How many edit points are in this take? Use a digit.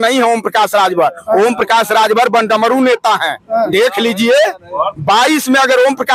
0